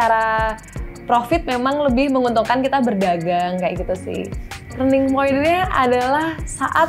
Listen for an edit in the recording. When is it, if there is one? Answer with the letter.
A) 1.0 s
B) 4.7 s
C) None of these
B